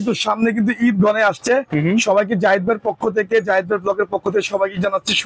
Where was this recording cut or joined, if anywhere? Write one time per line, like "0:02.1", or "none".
none

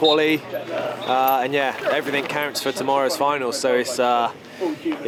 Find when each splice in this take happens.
none

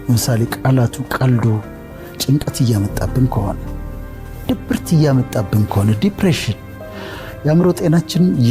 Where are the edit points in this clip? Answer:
0:06.7

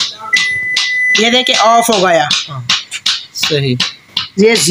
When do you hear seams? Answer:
none

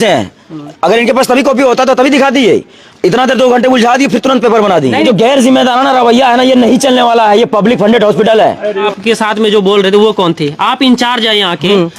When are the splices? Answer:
0:05.0
0:08.9

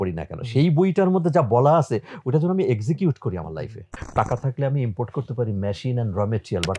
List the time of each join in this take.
0:03.9

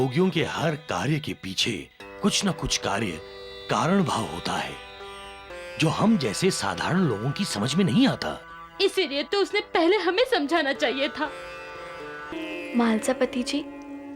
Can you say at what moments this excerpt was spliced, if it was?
0:12.3

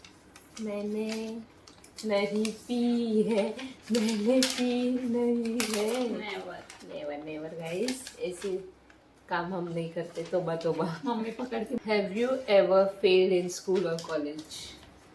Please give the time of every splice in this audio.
0:11.8

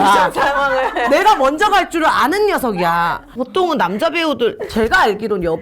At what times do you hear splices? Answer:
0:03.3

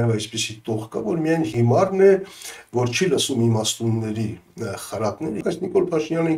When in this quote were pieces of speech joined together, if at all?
0:01.5
0:05.4

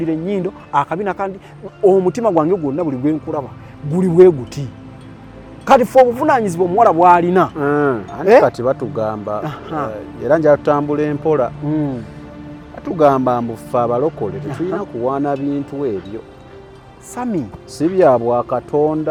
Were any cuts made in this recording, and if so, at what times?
none

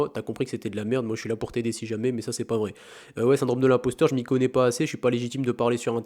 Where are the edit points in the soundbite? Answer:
none

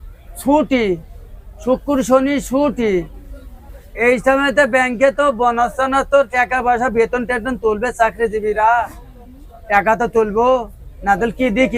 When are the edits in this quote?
none

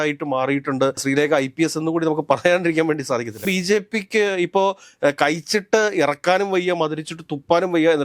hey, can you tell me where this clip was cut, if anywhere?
0:03.5

